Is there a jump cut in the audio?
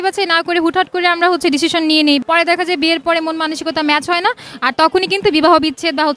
yes; 1 cut; at 2.2 s

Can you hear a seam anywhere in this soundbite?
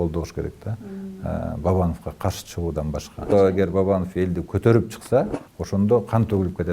yes; 1 cut; at 3.3 s

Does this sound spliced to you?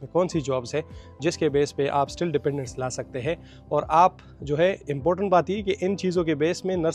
no; 0 cuts

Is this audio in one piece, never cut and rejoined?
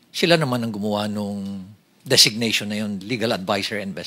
yes; 0 cuts

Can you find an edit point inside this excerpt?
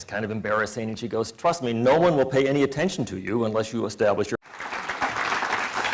no; 0 cuts

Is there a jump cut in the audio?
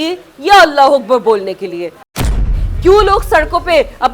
yes; 1 cut; at 2.4 s

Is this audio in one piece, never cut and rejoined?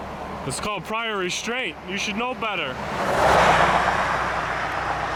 yes; 0 cuts

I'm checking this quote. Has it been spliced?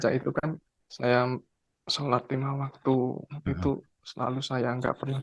no; 0 cuts

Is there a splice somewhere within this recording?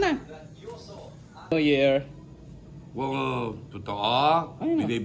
yes; 1 cut; at 1.5 s

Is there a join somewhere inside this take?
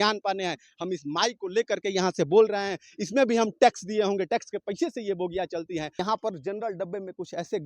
yes; 1 cut; at 6.0 s

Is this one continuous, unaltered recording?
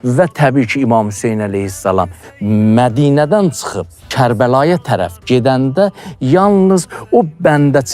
no; 1 cut; at 4.1 s

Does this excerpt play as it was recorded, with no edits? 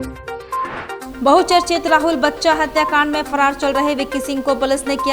no; 1 cut; at 1.1 s

